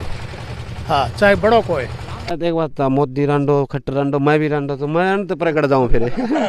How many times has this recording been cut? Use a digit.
1